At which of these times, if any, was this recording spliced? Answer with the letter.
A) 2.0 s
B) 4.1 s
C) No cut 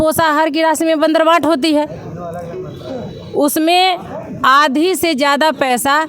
C